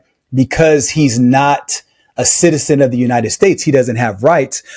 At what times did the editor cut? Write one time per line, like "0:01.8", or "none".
none